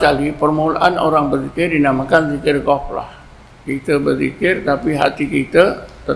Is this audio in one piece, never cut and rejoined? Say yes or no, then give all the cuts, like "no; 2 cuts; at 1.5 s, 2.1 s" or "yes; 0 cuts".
yes; 0 cuts